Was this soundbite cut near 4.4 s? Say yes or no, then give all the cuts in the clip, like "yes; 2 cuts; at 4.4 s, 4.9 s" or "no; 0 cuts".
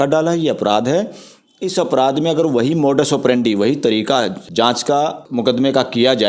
yes; 2 cuts; at 4.4 s, 5.2 s